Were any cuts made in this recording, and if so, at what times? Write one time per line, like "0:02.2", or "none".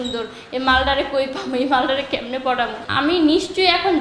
0:02.8